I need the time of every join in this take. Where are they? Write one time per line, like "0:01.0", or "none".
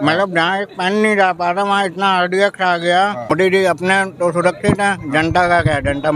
0:03.3